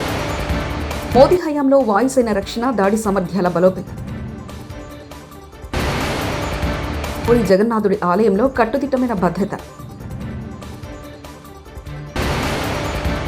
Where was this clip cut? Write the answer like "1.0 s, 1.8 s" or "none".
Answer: 1.0 s